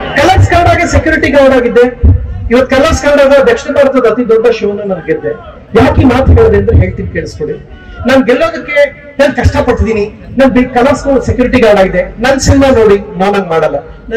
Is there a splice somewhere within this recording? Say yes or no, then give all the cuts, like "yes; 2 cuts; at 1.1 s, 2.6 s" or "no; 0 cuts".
no; 0 cuts